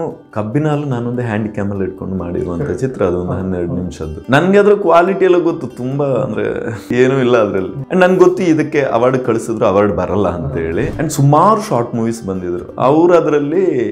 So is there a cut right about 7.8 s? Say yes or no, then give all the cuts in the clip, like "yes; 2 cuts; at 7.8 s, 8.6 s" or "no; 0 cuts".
yes; 4 cuts; at 4.2 s, 6.9 s, 7.8 s, 10.9 s